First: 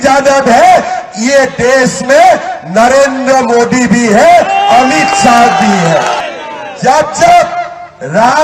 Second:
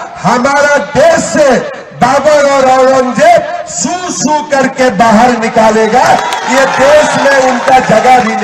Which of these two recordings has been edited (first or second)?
first